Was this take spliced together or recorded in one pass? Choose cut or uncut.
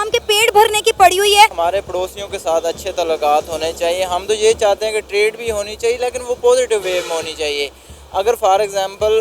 cut